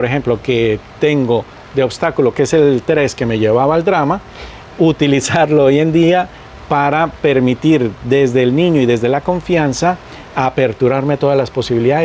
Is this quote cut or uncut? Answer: uncut